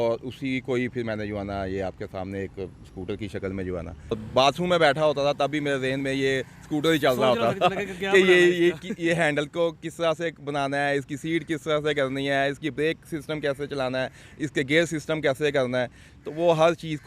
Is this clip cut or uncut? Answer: cut